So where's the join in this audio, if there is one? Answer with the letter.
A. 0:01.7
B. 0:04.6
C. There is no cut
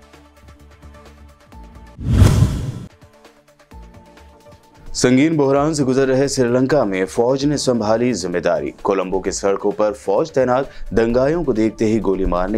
A